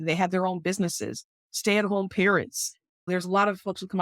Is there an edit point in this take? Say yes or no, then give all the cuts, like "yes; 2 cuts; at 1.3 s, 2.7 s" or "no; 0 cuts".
yes; 1 cut; at 3.1 s